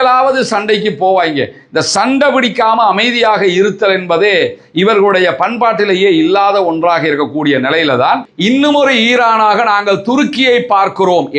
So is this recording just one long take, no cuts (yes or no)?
no